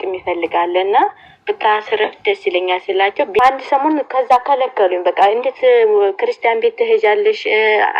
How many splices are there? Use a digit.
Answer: 1